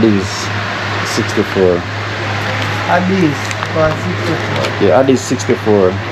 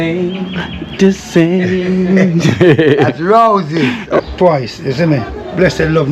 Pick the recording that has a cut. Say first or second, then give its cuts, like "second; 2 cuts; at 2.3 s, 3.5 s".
second; 1 cut; at 4.2 s